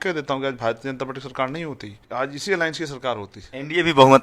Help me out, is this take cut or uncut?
cut